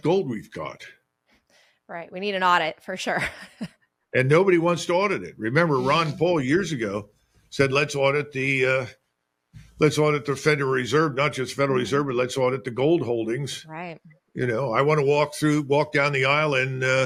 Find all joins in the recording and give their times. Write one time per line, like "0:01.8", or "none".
none